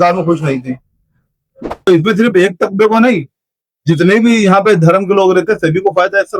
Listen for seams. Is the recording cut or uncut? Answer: cut